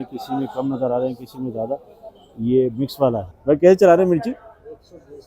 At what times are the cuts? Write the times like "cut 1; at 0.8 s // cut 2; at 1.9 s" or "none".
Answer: cut 1; at 3.3 s